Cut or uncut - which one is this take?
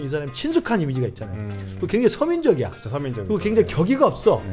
uncut